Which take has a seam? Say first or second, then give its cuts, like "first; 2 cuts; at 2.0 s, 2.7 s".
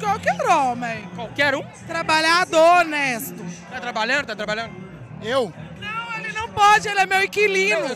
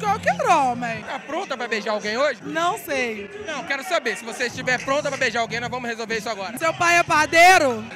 second; 2 cuts; at 1.0 s, 6.5 s